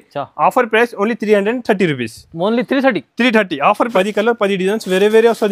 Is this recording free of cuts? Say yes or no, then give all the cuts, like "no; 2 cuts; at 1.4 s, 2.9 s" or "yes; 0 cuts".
no; 1 cut; at 3.9 s